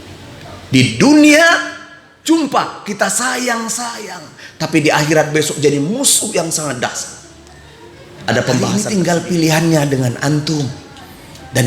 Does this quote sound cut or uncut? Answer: cut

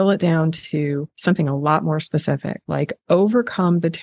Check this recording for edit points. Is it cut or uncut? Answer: cut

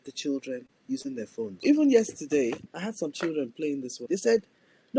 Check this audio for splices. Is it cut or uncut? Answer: cut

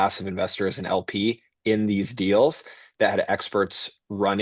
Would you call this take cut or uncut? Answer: uncut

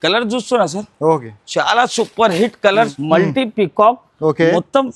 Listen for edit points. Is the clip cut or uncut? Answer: cut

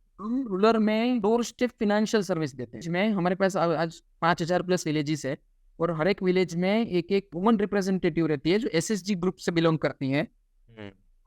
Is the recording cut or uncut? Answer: cut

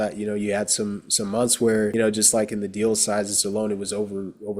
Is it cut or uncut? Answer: cut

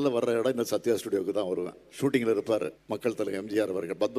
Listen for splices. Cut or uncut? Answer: cut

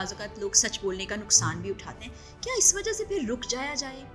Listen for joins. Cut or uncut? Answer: uncut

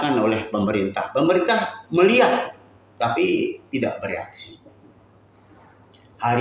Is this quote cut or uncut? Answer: uncut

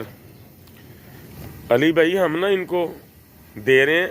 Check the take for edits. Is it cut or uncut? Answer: cut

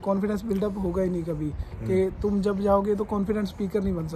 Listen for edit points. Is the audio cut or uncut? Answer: uncut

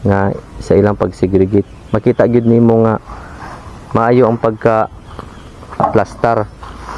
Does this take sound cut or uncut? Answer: cut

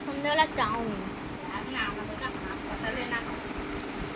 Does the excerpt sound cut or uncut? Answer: uncut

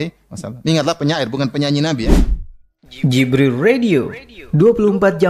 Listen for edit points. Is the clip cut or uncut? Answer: cut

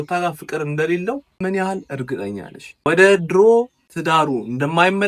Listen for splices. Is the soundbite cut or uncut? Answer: cut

